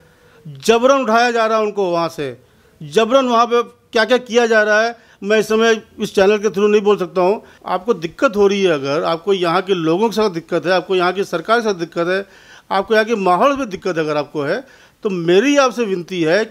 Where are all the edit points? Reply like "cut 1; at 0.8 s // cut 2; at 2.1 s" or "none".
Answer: cut 1; at 7.6 s